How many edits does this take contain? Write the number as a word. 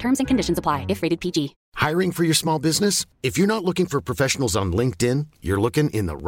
one